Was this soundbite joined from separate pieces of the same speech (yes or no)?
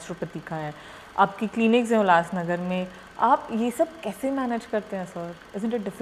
no